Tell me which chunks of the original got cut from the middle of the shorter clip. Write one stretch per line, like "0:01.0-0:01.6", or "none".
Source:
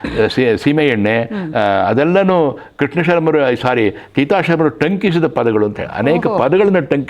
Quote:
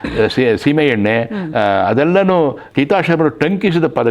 0:02.6-0:04.0